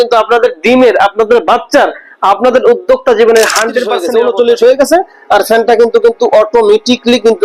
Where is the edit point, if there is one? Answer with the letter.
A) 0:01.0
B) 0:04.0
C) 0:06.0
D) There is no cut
B